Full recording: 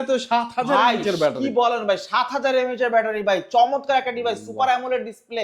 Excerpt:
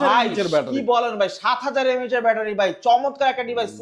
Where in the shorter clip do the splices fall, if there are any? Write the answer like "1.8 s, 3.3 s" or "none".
none